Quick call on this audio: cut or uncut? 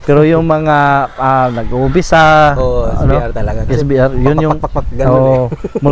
uncut